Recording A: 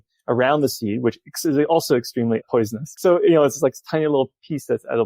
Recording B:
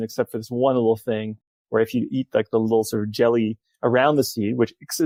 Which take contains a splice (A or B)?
A